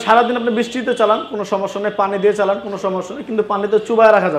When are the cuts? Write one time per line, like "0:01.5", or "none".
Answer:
none